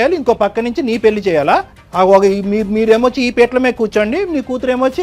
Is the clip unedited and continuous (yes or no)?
no